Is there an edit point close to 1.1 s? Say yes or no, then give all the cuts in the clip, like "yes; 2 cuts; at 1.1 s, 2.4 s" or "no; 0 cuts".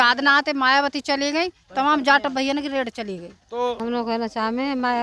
no; 1 cut; at 3.8 s